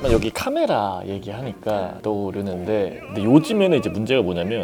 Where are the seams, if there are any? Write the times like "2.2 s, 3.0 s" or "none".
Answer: none